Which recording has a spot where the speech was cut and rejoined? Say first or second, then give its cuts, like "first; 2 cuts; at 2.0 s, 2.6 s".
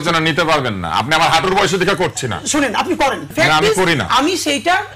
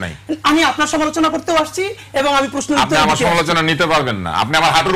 first; 1 cut; at 3.3 s